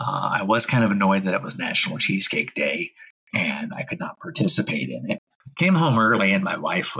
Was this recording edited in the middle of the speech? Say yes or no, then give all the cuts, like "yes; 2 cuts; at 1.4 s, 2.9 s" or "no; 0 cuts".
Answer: yes; 1 cut; at 5.3 s